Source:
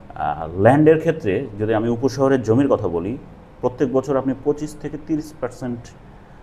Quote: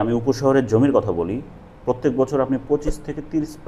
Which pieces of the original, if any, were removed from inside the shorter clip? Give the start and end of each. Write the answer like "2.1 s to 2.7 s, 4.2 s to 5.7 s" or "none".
none